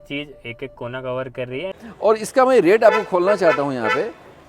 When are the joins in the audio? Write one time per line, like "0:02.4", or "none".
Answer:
0:01.8